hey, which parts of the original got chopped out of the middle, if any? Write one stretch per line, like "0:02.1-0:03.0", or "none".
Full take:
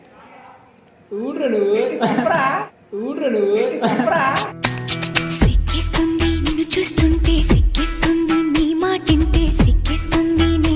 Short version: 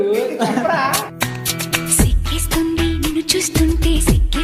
0:02.7-0:04.5